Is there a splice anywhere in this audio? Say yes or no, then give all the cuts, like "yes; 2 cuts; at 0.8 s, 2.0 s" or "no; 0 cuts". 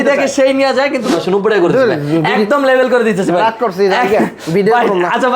yes; 1 cut; at 1.1 s